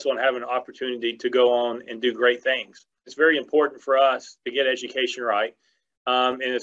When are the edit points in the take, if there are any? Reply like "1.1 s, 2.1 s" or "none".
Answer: 3.1 s